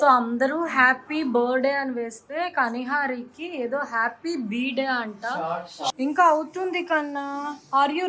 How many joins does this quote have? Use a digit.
1